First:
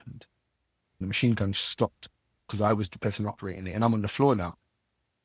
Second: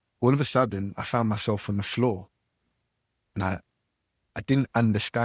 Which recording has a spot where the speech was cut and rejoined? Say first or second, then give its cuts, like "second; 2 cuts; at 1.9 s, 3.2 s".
first; 1 cut; at 1.0 s